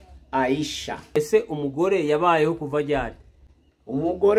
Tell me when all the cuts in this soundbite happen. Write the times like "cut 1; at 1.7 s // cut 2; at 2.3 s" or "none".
cut 1; at 1.2 s